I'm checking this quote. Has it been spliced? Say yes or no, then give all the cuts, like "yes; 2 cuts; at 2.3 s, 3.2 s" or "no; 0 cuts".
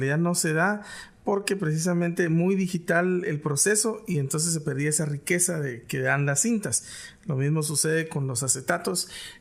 yes; 1 cut; at 7.9 s